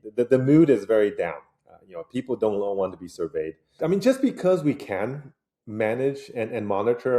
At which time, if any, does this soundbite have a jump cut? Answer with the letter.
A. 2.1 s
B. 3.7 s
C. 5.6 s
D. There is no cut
B